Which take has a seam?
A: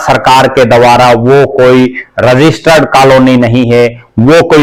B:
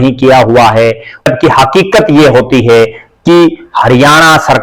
B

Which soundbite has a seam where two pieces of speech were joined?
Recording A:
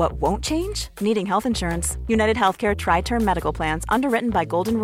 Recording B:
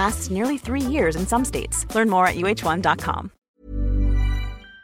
B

